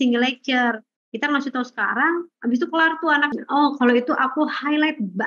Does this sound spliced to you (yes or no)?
yes